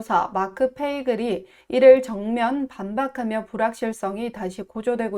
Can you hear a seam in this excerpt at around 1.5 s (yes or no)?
no